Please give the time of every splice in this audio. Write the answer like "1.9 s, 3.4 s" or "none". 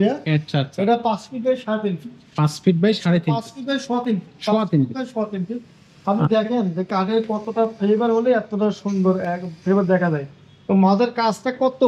none